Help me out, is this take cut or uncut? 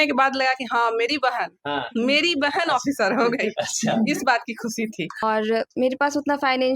cut